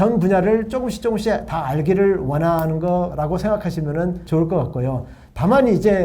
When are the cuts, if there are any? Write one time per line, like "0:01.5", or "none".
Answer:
0:03.1
0:04.2

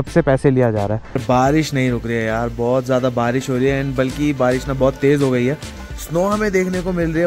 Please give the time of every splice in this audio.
0:01.2

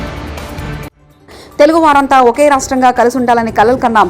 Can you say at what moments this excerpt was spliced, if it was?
0:01.1

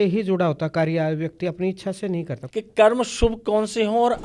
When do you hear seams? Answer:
0:02.4

